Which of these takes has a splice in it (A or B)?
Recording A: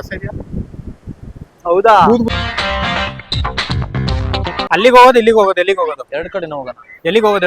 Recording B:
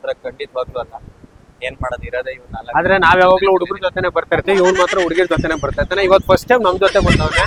A